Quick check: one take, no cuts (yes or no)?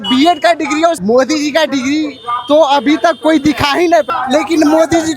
no